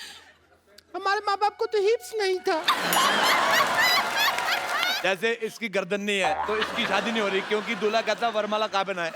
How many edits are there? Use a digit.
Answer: 1